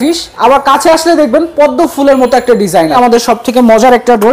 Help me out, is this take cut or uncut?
cut